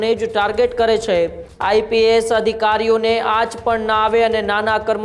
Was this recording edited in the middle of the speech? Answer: yes; 1 cut; at 1.5 s

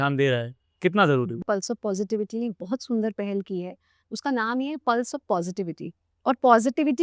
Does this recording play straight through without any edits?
no; 1 cut; at 1.4 s

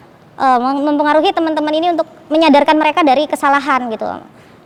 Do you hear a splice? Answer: no; 0 cuts

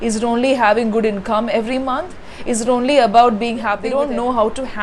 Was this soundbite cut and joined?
yes; 1 cut; at 3.8 s

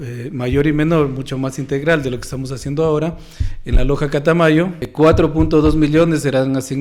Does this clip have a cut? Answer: yes; 1 cut; at 4.9 s

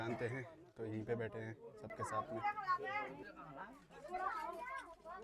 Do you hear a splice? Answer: yes; 1 cut; at 1.9 s

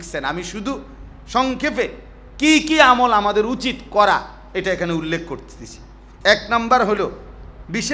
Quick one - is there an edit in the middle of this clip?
no; 0 cuts

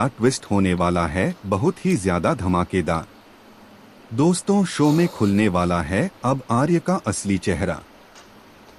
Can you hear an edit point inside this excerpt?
no; 0 cuts

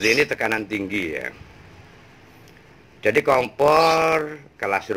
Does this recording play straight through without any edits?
yes; 0 cuts

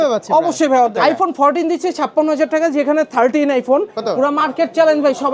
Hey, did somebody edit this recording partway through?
yes; 2 cuts; at 0.9 s, 3.9 s

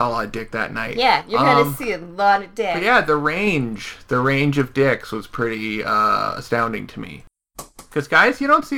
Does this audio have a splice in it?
no; 0 cuts

